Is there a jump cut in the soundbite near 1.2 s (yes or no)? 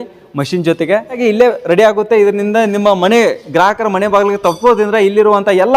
yes